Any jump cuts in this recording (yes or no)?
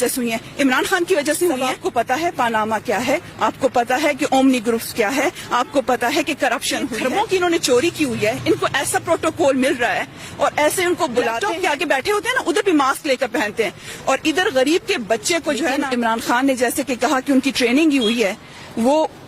yes